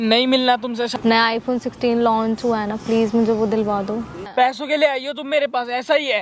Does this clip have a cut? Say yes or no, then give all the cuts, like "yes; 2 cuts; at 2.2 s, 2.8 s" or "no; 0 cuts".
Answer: yes; 2 cuts; at 0.9 s, 4.2 s